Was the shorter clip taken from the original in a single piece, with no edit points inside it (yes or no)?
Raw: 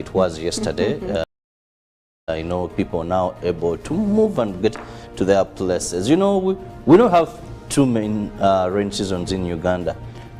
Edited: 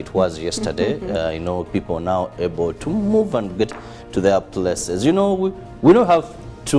no